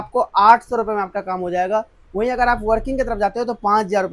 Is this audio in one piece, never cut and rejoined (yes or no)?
yes